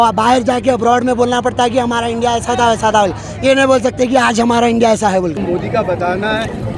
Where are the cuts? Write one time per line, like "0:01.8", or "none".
0:05.4